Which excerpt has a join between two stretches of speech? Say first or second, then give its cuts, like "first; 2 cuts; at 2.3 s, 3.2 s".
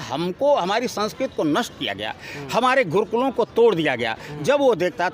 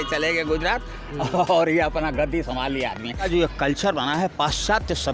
second; 1 cut; at 3.3 s